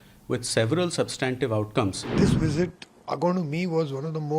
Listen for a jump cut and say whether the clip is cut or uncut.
cut